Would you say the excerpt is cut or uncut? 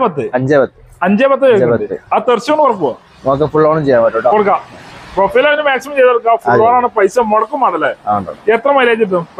uncut